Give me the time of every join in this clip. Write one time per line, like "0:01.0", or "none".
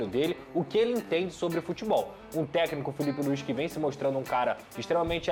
0:02.2